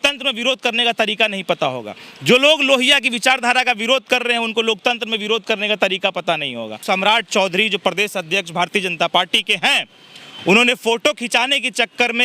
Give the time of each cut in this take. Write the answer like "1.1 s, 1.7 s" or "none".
6.8 s